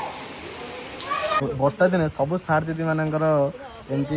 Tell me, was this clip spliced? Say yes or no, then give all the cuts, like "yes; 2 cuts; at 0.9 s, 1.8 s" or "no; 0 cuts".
yes; 1 cut; at 1.4 s